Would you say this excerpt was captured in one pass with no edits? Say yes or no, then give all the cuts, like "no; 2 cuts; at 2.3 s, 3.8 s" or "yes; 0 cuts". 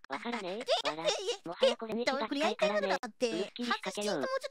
no; 1 cut; at 1.9 s